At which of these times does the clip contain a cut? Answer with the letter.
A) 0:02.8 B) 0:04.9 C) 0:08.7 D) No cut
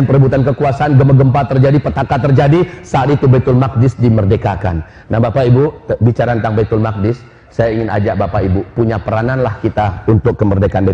D